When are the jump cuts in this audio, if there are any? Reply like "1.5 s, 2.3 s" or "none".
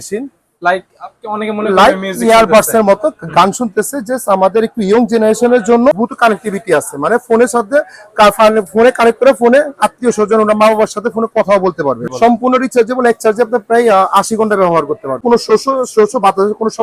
6.0 s, 12.1 s, 15.2 s